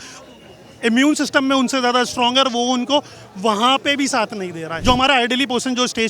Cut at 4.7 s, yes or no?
yes